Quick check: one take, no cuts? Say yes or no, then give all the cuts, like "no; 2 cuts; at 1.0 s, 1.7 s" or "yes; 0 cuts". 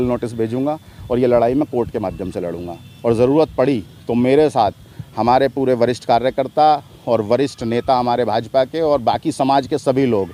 yes; 0 cuts